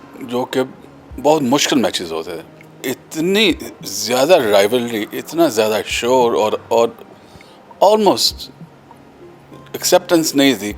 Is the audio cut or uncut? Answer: cut